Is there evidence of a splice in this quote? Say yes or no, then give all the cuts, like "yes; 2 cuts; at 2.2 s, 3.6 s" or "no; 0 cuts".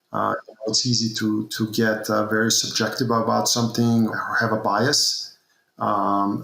yes; 2 cuts; at 1.5 s, 4.1 s